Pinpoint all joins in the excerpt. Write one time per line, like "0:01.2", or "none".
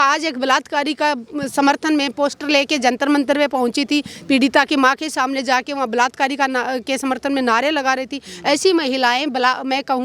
none